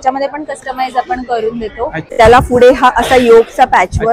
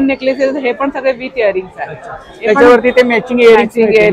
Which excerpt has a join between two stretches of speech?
first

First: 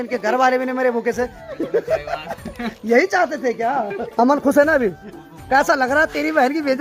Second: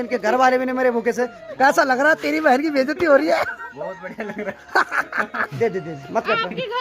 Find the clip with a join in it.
second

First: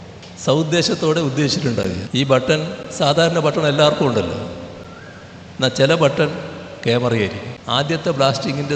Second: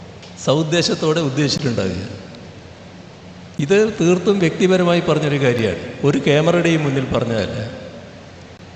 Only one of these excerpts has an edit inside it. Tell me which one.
first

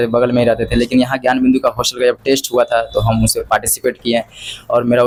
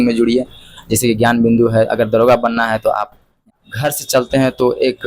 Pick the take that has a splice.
second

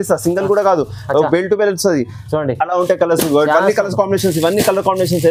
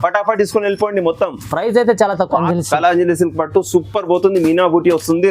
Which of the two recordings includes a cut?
second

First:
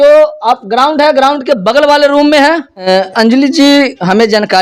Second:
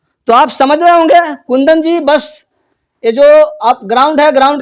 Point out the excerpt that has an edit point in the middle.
first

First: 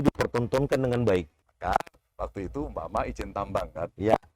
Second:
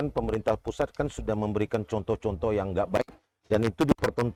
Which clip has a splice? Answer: first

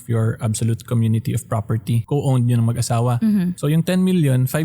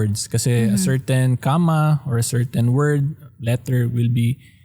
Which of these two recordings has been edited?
first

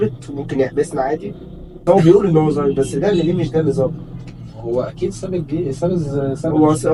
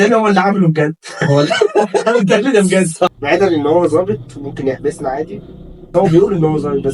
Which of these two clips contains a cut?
second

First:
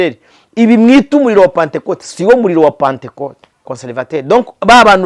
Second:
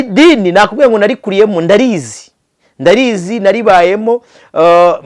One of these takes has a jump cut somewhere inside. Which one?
first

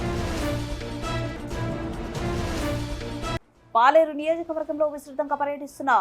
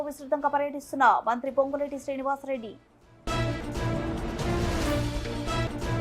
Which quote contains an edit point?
first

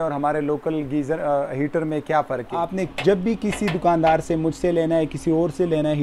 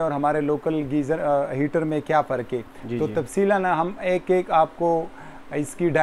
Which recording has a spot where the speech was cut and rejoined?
first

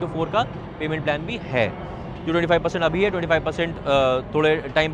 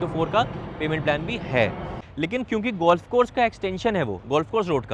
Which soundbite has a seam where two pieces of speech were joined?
second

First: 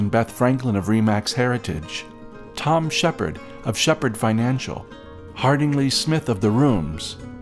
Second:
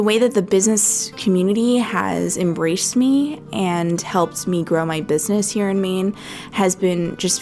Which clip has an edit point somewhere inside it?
second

